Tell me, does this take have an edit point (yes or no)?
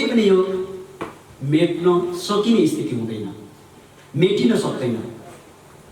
no